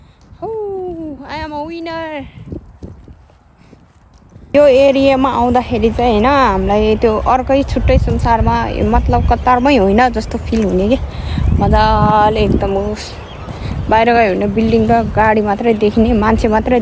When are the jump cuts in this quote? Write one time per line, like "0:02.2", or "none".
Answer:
0:04.5